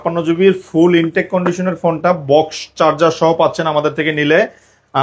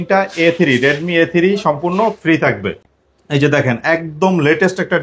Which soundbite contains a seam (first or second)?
second